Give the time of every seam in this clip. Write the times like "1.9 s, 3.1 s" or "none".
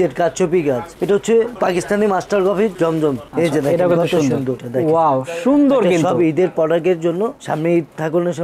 0.9 s, 4.6 s